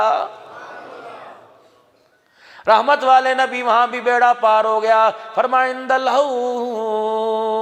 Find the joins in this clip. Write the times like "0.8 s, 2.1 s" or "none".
none